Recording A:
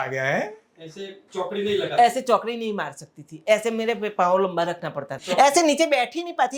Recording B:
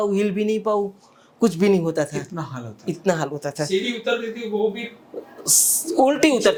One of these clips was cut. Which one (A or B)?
A